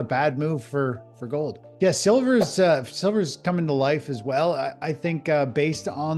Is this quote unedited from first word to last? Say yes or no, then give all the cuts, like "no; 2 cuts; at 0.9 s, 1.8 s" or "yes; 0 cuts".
no; 1 cut; at 1.6 s